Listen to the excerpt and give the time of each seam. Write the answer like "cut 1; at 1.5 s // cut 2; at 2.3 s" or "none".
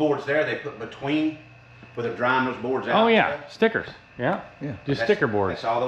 none